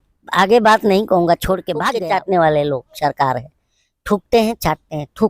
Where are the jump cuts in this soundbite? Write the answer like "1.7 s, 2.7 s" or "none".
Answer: 1.9 s